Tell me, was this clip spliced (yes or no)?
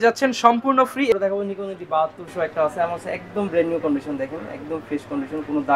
yes